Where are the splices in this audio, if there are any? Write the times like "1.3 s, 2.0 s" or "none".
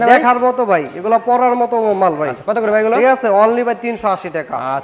none